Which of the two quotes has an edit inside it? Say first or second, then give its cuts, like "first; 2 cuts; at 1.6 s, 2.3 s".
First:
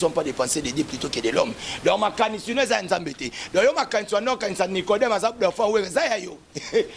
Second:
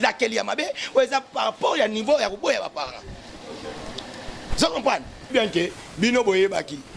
second; 1 cut; at 5.3 s